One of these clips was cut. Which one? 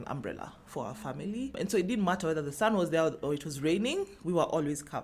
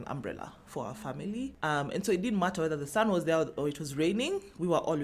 first; 1 cut; at 1.5 s

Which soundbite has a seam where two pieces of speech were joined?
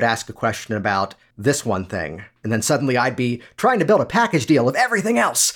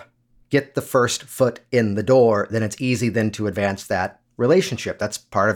first; 1 cut; at 1.2 s

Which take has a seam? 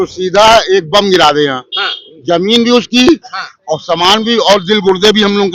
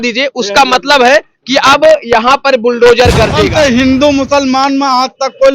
second; 1 cut; at 3.4 s

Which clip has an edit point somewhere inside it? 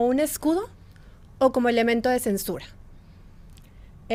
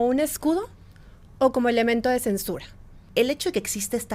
second; 1 cut; at 3.0 s

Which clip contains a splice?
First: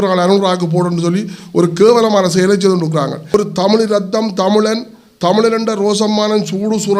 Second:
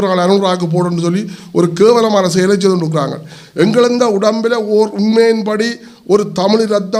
first; 1 cut; at 3.3 s

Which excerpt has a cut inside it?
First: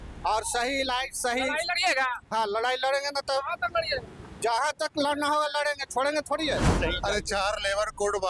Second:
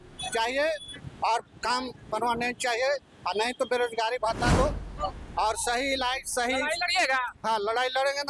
first; 1 cut; at 6.7 s

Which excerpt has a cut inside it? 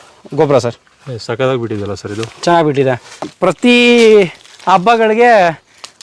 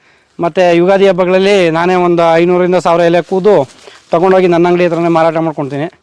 first; 1 cut; at 3.3 s

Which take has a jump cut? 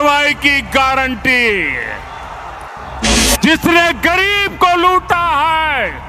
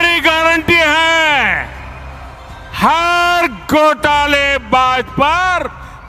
first; 1 cut; at 3.2 s

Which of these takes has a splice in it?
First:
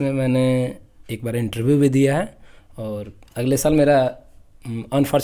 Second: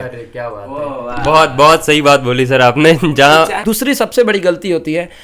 second; 1 cut; at 3.6 s

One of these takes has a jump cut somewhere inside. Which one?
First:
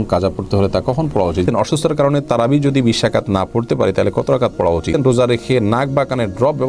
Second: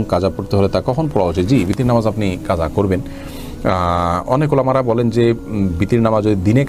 first; 2 cuts; at 1.5 s, 5.0 s

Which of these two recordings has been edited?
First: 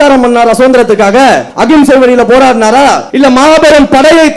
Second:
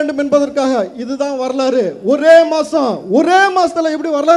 first; 2 cuts; at 1.5 s, 3.0 s

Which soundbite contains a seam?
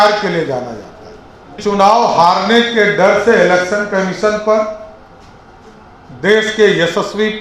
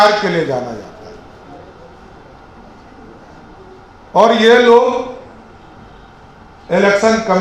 first; 1 cut; at 1.6 s

